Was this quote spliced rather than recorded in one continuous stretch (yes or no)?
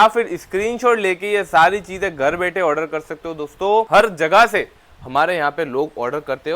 yes